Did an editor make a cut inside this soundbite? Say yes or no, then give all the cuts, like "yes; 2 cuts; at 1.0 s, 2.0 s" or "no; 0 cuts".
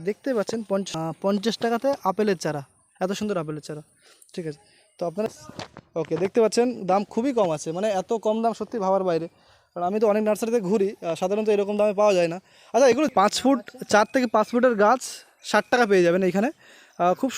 yes; 3 cuts; at 0.9 s, 5.3 s, 13.1 s